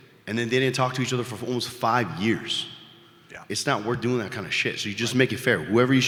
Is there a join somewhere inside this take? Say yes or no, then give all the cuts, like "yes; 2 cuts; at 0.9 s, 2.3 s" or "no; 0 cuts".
no; 0 cuts